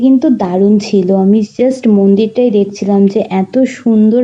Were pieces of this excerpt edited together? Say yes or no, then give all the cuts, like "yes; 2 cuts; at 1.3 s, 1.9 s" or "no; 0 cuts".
no; 0 cuts